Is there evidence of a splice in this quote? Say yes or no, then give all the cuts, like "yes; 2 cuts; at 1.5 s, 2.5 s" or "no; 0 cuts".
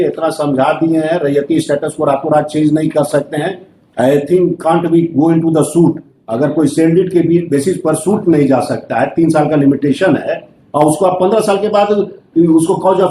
no; 0 cuts